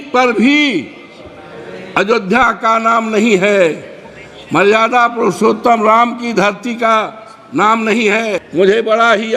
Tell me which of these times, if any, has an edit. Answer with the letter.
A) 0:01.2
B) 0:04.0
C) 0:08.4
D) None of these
C